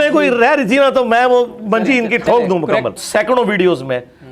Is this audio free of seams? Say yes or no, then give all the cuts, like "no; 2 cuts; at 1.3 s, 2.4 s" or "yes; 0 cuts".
no; 1 cut; at 3.0 s